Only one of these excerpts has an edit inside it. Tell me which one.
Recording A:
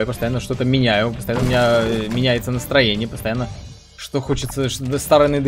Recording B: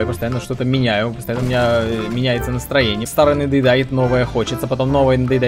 B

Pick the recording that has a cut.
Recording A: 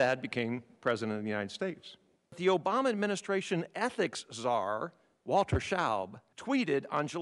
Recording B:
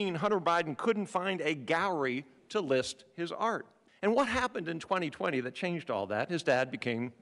A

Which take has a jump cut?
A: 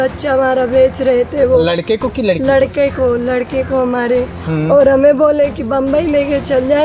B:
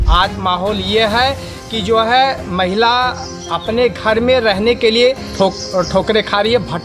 B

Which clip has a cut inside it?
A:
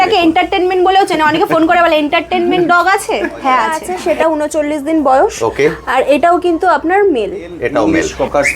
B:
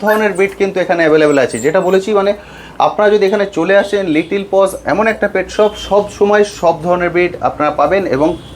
A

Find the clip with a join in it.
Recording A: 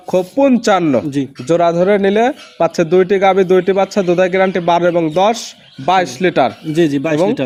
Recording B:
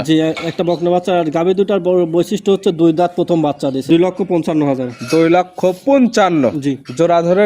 B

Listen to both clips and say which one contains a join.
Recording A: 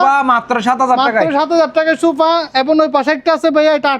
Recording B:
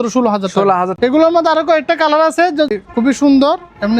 B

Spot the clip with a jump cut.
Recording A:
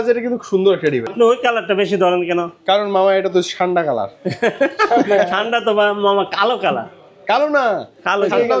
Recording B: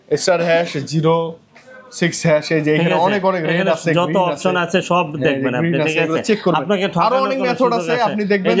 A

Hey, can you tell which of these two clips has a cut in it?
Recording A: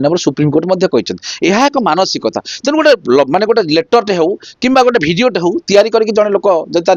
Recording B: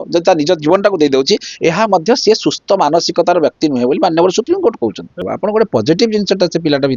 B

